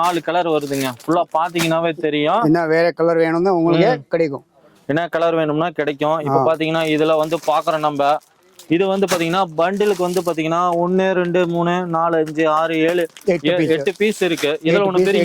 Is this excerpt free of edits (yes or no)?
yes